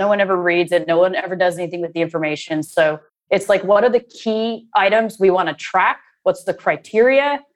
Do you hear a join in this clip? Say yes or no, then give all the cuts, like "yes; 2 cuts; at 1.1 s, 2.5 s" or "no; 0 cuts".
no; 0 cuts